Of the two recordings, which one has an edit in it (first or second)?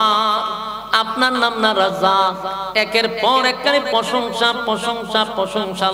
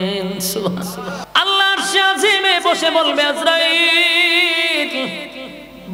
second